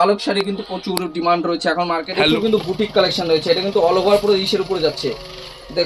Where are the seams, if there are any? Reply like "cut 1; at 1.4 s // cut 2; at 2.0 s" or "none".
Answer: cut 1; at 2.0 s